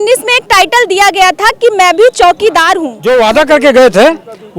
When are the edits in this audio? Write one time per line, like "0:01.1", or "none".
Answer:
0:02.9